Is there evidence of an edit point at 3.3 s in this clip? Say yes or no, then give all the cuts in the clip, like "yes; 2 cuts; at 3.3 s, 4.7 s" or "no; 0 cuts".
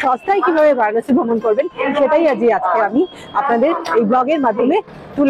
no; 0 cuts